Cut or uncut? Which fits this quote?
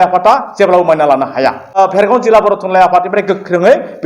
cut